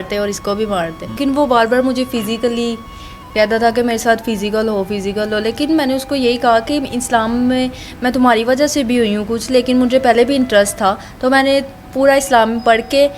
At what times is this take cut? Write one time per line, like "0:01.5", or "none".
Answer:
0:01.2